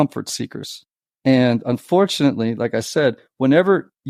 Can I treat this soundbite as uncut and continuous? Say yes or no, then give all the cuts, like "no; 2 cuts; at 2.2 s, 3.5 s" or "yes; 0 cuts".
yes; 0 cuts